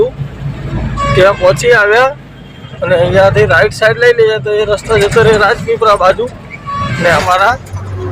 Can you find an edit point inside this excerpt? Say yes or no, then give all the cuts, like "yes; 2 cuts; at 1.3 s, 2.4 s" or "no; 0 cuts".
yes; 1 cut; at 7.2 s